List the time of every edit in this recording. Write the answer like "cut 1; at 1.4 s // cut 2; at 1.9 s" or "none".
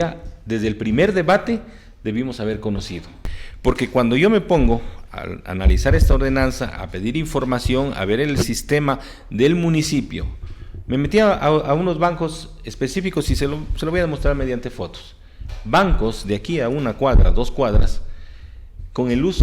cut 1; at 3.2 s